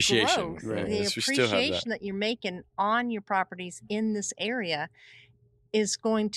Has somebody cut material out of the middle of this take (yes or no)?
no